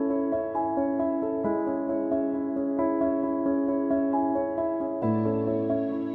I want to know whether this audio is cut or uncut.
cut